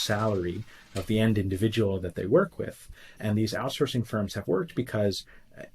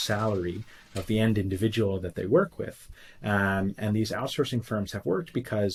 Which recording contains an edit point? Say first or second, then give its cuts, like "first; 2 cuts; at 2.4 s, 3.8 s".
first; 1 cut; at 3.2 s